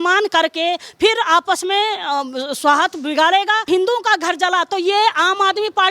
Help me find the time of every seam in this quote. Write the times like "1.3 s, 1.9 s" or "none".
3.7 s